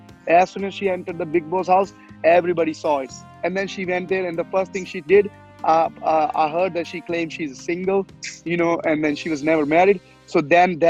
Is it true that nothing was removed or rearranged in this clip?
yes; 0 cuts

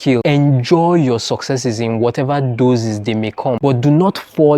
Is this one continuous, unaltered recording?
yes; 0 cuts

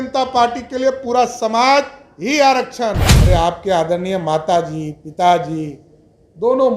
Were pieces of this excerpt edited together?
yes; 1 cut; at 3.1 s

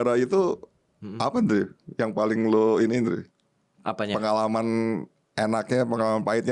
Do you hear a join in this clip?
no; 0 cuts

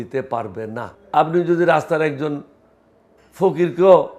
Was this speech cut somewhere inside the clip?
yes; 1 cut; at 0.9 s

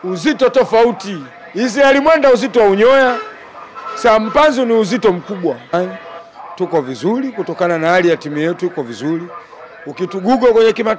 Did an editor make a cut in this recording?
yes; 1 cut; at 5.7 s

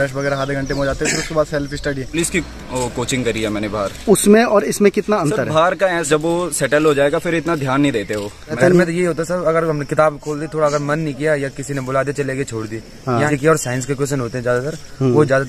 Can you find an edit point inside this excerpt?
yes; 4 cuts; at 2.1 s, 6.1 s, 8.6 s, 13.3 s

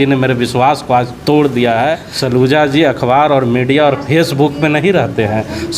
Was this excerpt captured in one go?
no; 1 cut; at 2.1 s

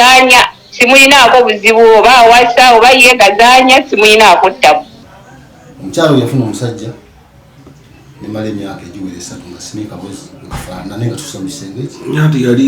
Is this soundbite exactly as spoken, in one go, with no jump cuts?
no; 1 cut; at 4.9 s

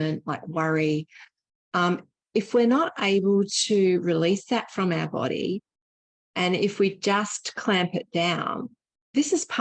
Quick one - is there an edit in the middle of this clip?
no; 0 cuts

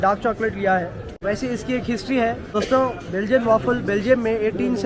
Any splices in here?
no; 0 cuts

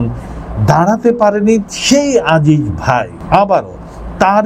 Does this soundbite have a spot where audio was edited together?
yes; 1 cut; at 3.2 s

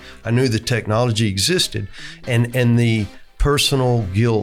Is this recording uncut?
yes; 0 cuts

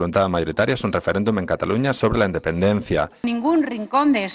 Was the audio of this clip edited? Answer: yes; 1 cut; at 3.2 s

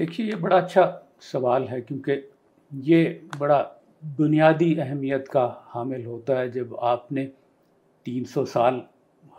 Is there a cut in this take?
no; 0 cuts

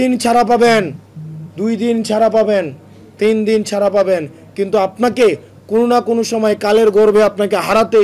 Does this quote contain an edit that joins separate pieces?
no; 0 cuts

